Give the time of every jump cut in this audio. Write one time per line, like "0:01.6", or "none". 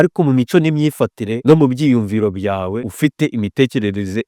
0:01.3
0:02.9